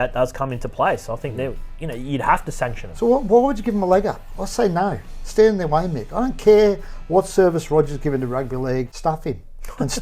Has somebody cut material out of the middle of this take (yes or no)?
yes